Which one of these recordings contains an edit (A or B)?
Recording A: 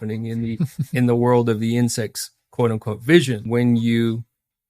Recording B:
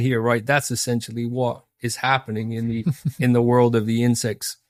A